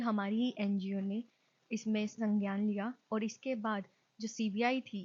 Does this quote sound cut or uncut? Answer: uncut